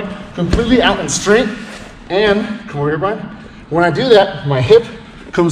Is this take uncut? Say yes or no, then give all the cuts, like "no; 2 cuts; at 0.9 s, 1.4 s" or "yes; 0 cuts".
yes; 0 cuts